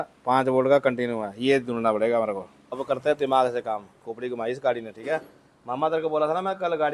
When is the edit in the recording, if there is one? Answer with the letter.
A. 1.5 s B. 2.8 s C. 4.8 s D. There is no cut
B